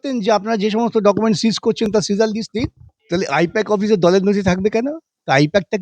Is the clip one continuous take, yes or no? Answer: no